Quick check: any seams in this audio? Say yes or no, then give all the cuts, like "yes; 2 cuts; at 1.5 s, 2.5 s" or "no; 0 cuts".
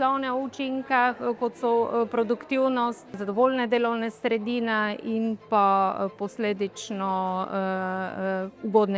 yes; 1 cut; at 3.2 s